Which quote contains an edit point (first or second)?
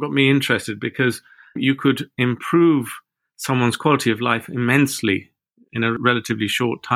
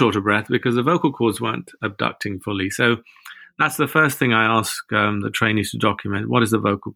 first